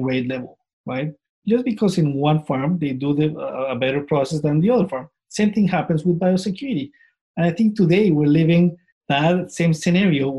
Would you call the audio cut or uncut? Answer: cut